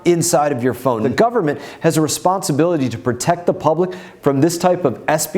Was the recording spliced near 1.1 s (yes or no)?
yes